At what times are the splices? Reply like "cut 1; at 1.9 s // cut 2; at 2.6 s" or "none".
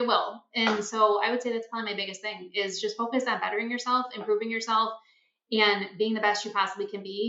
none